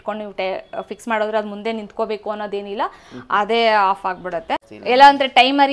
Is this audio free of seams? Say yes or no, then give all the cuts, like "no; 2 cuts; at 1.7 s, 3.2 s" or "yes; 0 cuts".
no; 1 cut; at 4.6 s